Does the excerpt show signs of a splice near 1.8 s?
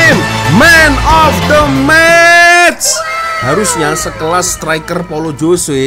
no; 1 cut; at 3.4 s

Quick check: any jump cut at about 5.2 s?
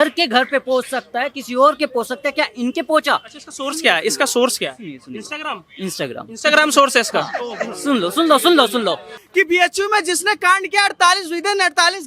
no; 1 cut; at 9.2 s

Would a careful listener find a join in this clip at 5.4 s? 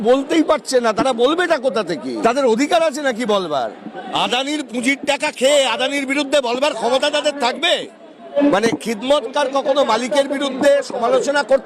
no; 3 cuts; at 2.1 s, 4.1 s, 8.4 s

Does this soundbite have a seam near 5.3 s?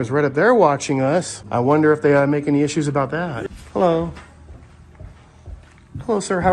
no; 2 cuts; at 1.4 s, 3.4 s

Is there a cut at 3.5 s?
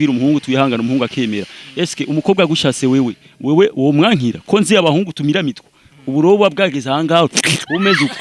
no; 0 cuts

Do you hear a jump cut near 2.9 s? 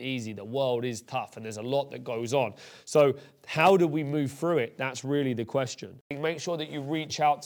no; 1 cut; at 6.1 s

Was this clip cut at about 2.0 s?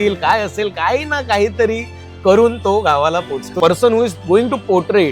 no; 1 cut; at 3.6 s

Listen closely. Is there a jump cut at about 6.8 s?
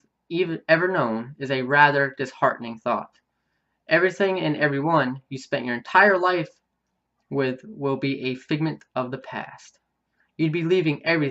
no; 1 cut; at 9.9 s

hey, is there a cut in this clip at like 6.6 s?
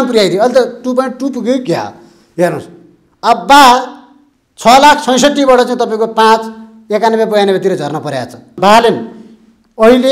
no; 1 cut; at 8.6 s

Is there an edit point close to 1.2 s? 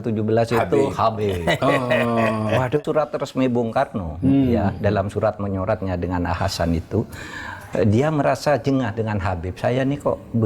no; 1 cut; at 2.8 s

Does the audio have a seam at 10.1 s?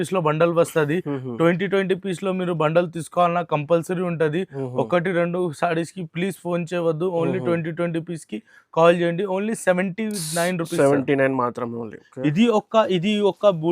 no; 1 cut; at 12.0 s

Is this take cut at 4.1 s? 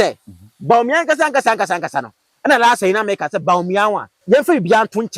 yes; 1 cut; at 4.1 s

